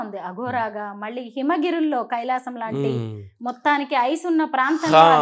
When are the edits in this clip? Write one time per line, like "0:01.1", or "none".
none